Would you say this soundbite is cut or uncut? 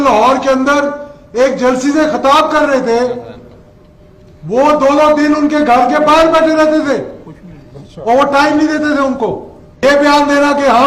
cut